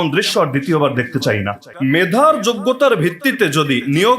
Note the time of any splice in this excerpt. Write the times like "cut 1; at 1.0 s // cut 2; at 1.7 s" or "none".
cut 1; at 1.6 s